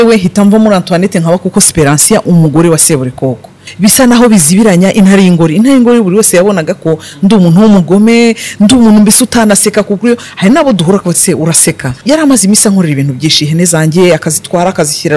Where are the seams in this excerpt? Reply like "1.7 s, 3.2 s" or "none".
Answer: 3.6 s, 12.0 s